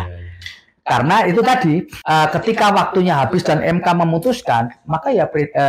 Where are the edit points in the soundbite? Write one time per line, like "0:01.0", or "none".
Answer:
none